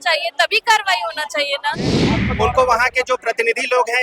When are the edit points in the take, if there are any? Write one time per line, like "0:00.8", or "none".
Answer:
0:02.0